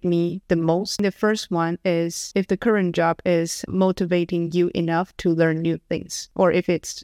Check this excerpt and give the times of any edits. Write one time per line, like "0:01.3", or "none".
0:01.0
0:03.6